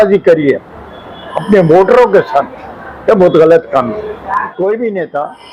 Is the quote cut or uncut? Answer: cut